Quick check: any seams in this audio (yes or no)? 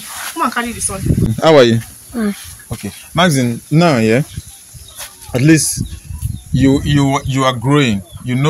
yes